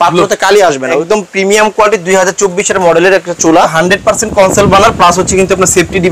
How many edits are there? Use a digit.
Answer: 2